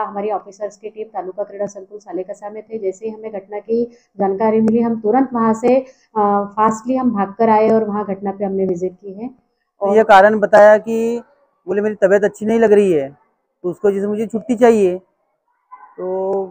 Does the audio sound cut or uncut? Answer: cut